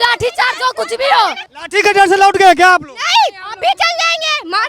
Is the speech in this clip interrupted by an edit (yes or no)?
yes